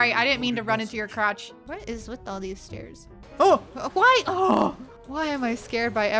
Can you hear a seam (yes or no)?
yes